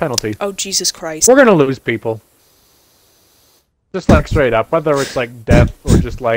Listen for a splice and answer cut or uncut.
cut